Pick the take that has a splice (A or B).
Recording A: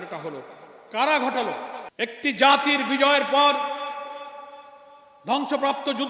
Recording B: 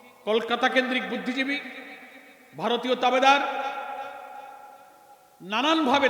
A